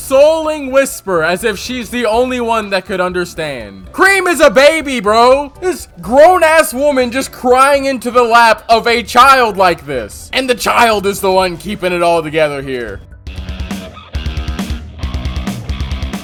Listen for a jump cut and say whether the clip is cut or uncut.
uncut